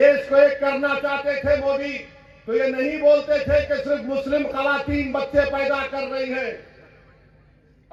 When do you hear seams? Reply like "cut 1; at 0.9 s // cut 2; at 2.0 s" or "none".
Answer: none

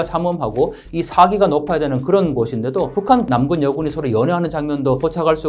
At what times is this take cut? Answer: cut 1; at 3.2 s

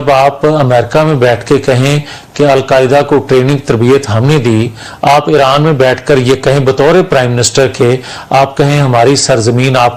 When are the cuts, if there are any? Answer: none

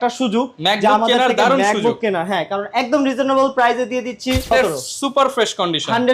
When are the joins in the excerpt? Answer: cut 1; at 4.5 s

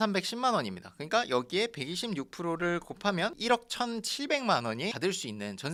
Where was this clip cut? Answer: none

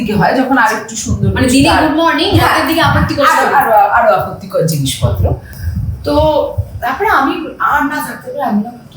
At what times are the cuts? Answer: none

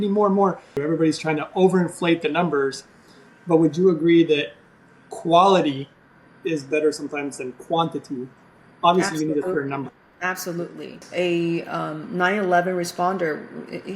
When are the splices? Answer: cut 1; at 0.8 s // cut 2; at 11.0 s

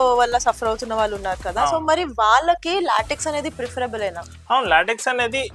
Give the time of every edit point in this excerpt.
none

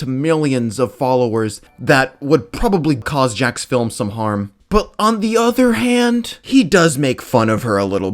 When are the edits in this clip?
cut 1; at 3.1 s

